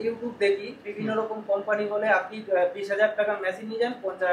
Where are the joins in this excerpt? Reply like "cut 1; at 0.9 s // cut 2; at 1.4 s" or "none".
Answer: none